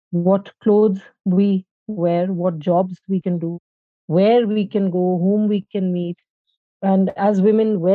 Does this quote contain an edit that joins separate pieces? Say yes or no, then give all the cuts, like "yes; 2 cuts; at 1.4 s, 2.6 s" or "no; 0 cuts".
yes; 2 cuts; at 3.7 s, 6.8 s